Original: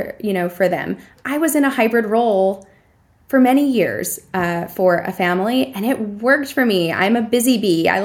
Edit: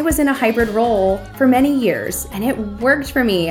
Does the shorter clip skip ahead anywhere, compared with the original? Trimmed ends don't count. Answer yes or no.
yes